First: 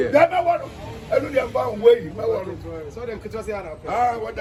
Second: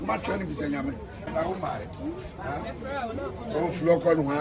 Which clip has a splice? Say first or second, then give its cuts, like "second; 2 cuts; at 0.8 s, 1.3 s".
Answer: second; 1 cut; at 1.3 s